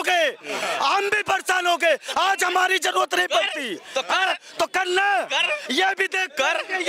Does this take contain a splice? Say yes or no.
no